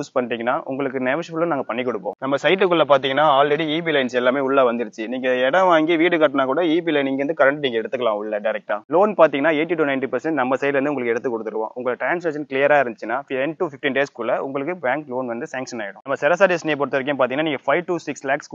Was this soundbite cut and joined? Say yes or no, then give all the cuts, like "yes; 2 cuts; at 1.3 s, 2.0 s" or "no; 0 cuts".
yes; 3 cuts; at 2.1 s, 8.8 s, 15.9 s